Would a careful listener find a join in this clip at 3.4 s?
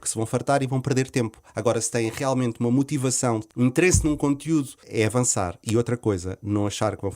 yes; 2 cuts; at 3.4 s, 4.8 s

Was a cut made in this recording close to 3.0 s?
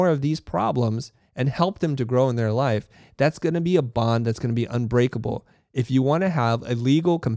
no; 0 cuts

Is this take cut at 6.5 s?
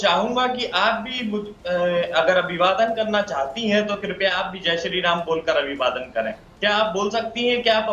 yes; 1 cut; at 6.5 s

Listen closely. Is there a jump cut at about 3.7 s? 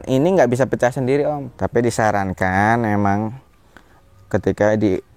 no; 1 cut; at 1.5 s

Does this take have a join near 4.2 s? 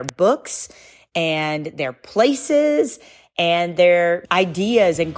yes; 1 cut; at 4.2 s

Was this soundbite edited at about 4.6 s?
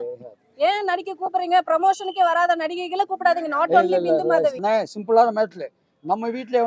yes; 1 cut; at 4.6 s

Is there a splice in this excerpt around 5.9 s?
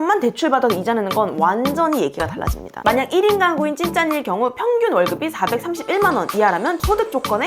no; 1 cut; at 2.8 s

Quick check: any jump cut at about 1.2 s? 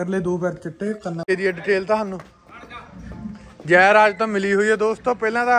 yes; 1 cut; at 1.2 s

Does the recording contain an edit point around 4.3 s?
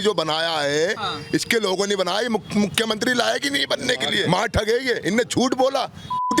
yes; 1 cut; at 4.3 s

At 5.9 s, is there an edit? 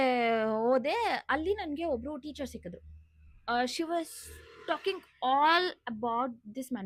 no; 0 cuts

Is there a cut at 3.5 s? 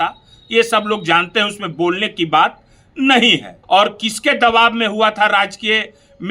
yes; 1 cut; at 3.5 s

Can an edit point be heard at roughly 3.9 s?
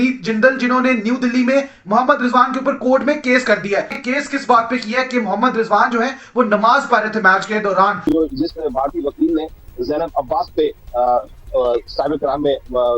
yes; 2 cuts; at 3.9 s, 8.0 s

